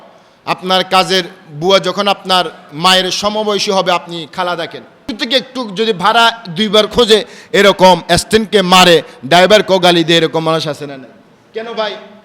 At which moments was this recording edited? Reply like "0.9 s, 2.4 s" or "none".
5.1 s